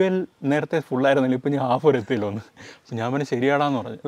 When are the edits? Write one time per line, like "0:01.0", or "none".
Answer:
none